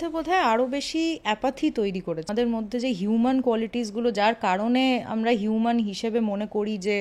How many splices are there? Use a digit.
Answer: 1